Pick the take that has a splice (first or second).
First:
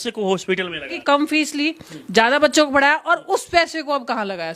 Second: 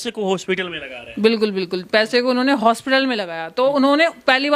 first